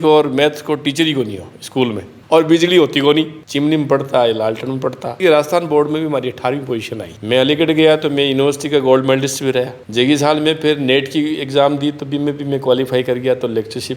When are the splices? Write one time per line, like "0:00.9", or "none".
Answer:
0:02.2
0:05.2
0:07.0